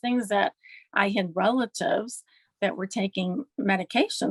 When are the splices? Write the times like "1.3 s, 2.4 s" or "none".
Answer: none